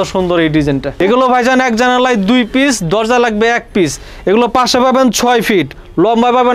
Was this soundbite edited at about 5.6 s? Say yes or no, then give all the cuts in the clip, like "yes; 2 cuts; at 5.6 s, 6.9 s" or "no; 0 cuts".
no; 1 cut; at 1.0 s